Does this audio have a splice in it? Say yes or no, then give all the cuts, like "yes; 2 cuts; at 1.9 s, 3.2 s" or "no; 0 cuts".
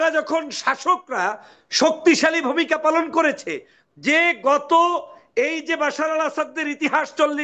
no; 0 cuts